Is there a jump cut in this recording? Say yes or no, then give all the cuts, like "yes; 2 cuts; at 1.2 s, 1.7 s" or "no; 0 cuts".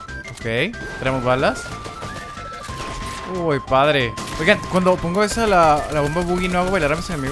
yes; 1 cut; at 4.2 s